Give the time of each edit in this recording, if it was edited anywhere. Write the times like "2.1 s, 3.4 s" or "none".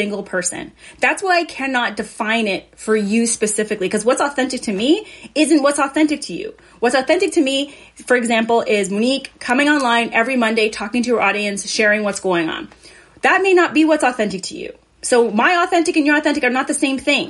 none